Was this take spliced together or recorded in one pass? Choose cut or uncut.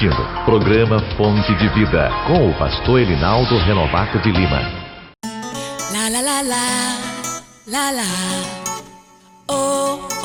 uncut